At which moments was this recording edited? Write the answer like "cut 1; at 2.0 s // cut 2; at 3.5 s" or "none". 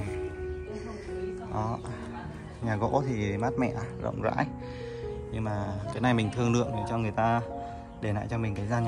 none